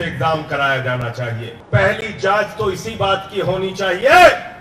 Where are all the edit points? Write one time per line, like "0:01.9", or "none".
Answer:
0:01.5